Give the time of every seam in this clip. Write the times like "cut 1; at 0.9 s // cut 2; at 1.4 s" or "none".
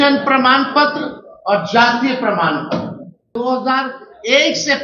cut 1; at 3.4 s